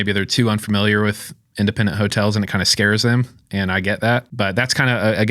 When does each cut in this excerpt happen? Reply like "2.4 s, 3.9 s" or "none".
4.3 s

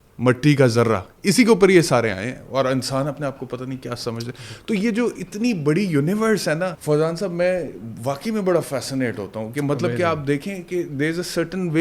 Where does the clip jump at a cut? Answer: 6.8 s

